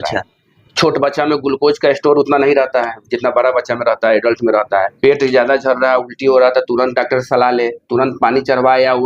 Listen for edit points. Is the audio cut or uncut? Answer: cut